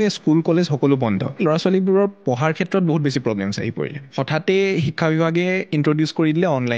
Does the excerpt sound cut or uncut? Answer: cut